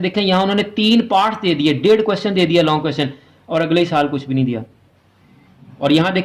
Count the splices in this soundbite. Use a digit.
0